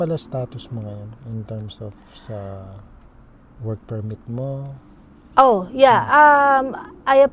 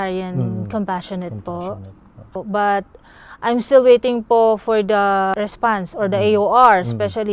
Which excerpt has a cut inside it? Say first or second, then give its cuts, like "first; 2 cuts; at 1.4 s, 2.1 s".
second; 2 cuts; at 2.4 s, 5.3 s